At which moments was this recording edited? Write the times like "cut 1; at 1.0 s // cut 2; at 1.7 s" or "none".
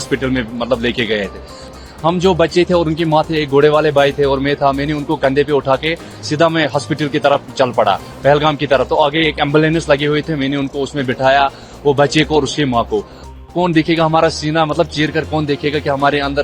cut 1; at 1.7 s // cut 2; at 13.3 s